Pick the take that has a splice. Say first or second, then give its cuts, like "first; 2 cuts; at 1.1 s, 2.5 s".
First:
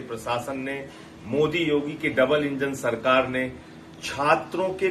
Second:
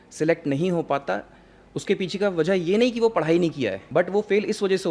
second; 1 cut; at 3.8 s